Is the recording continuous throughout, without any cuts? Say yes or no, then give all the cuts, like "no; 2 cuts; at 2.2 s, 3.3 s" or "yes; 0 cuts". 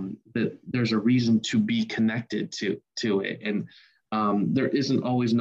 yes; 0 cuts